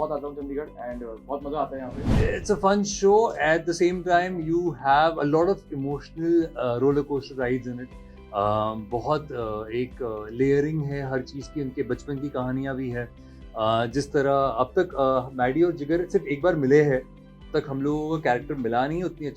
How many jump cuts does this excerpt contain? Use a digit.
1